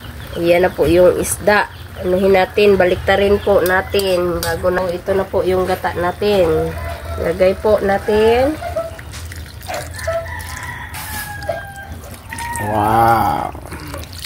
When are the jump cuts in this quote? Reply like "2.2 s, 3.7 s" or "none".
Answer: 4.8 s